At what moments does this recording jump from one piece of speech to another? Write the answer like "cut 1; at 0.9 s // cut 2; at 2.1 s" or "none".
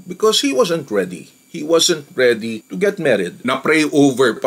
cut 1; at 3.4 s